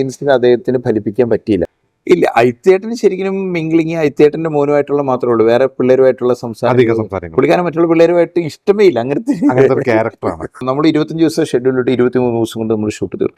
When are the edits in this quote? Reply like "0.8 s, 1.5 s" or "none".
1.7 s, 10.7 s